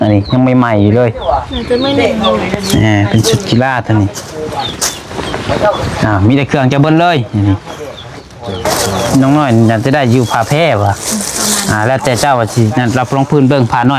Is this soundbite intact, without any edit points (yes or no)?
no